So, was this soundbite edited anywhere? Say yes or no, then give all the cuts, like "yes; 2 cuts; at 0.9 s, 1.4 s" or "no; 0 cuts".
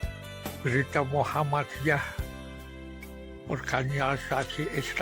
no; 0 cuts